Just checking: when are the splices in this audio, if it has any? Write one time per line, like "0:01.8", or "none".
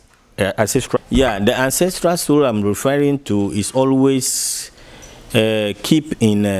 0:01.0